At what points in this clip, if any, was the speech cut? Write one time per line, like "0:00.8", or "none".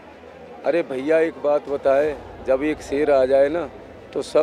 none